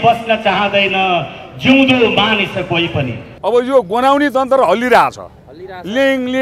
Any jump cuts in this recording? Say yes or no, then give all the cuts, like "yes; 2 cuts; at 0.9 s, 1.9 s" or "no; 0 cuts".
yes; 1 cut; at 3.2 s